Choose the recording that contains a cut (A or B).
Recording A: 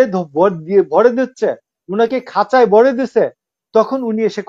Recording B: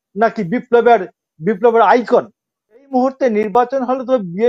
B